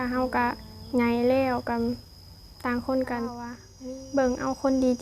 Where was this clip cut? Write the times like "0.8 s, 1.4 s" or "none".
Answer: 3.6 s